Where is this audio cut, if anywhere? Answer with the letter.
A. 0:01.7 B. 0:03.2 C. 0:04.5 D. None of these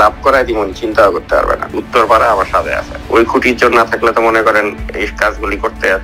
A